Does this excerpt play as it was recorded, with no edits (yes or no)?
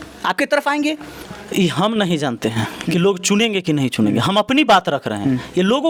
yes